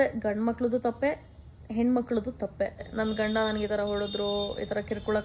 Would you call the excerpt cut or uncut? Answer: cut